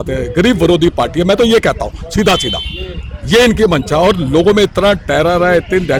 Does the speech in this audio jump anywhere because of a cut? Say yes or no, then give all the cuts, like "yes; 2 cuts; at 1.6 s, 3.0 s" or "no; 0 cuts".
no; 0 cuts